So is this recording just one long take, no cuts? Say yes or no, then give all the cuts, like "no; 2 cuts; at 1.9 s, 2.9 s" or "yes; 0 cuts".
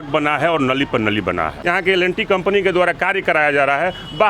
no; 1 cut; at 1.6 s